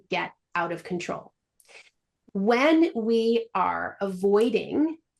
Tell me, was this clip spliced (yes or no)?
no